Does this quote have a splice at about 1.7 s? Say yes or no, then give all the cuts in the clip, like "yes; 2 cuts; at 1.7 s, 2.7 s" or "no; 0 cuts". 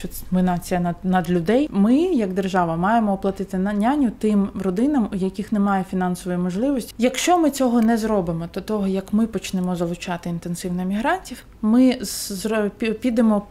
yes; 2 cuts; at 1.7 s, 6.9 s